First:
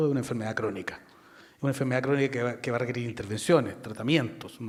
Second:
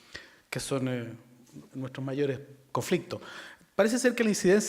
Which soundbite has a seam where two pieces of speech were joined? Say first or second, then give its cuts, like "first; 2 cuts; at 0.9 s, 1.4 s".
second; 1 cut; at 3.0 s